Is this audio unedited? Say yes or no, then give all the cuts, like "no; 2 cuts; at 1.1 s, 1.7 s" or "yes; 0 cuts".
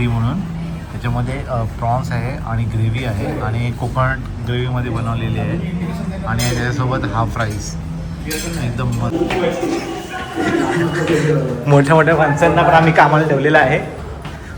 no; 1 cut; at 9.1 s